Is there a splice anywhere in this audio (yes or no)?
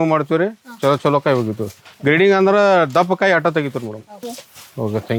no